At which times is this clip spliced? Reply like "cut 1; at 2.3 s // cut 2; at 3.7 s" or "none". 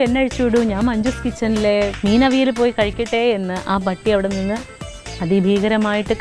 cut 1; at 1.9 s